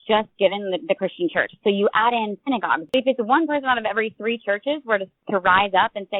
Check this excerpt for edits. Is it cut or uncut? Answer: cut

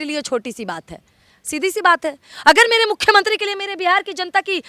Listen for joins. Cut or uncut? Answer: uncut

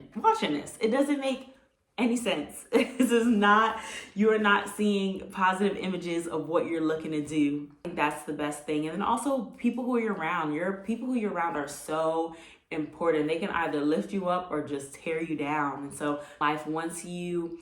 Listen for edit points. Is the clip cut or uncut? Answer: cut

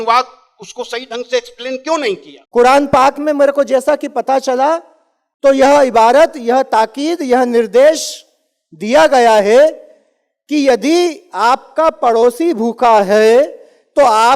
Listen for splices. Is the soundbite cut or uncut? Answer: cut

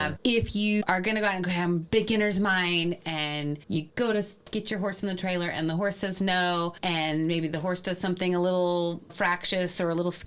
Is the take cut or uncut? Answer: uncut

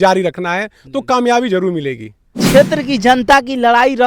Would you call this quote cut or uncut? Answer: cut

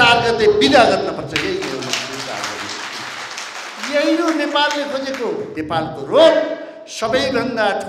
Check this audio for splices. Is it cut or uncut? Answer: cut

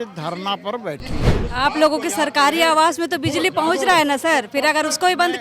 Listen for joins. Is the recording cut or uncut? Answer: cut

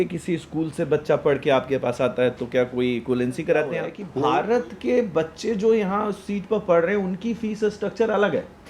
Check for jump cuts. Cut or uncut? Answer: cut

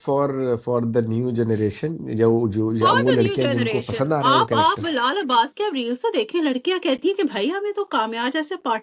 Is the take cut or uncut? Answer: uncut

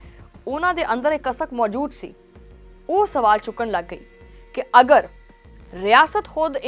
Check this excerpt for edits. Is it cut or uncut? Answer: uncut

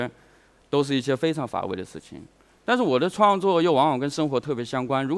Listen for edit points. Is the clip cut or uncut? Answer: uncut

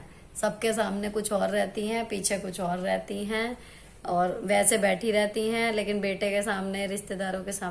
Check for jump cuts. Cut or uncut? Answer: uncut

